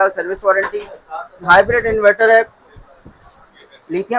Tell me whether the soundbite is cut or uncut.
uncut